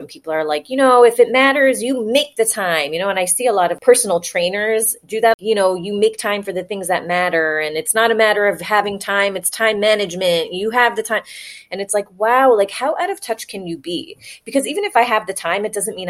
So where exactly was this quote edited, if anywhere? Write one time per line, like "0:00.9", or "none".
0:03.8
0:05.3